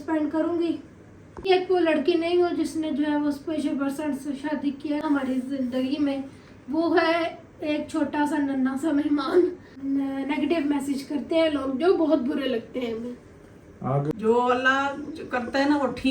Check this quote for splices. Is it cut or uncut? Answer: cut